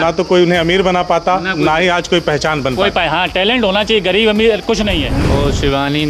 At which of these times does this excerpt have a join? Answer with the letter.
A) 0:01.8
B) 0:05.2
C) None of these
B